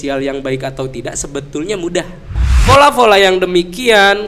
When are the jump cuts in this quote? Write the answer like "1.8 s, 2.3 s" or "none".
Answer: 2.4 s